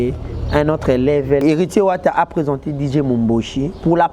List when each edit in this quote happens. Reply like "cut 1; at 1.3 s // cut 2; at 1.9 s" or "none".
cut 1; at 1.4 s